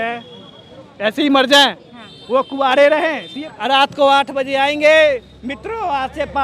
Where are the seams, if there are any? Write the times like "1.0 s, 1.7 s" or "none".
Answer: 3.4 s